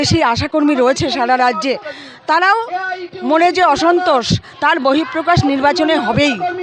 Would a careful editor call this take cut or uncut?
uncut